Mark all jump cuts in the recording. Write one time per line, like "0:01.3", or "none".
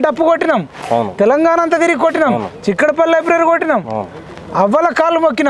none